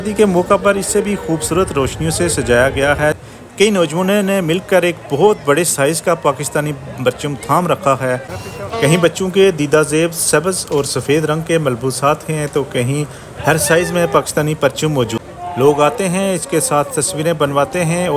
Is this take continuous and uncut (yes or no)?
no